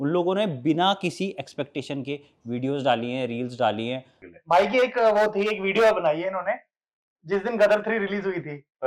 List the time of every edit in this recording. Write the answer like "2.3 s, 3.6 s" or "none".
4.2 s